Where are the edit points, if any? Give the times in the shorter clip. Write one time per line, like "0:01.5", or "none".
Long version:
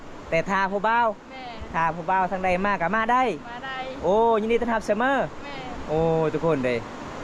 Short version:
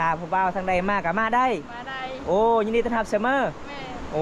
none